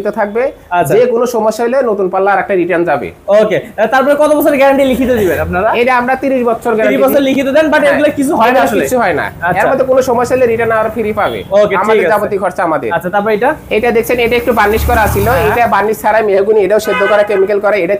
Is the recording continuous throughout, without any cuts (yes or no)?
yes